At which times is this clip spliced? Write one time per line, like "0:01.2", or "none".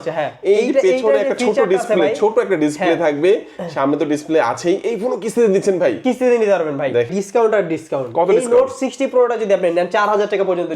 0:07.1